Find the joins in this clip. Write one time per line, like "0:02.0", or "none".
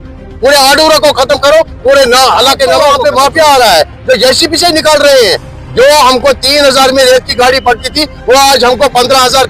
0:02.9

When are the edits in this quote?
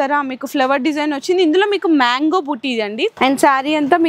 0:03.1

